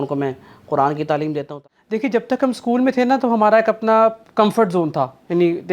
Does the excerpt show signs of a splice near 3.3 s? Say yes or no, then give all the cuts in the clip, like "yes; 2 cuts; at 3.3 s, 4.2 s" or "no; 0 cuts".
no; 1 cut; at 1.5 s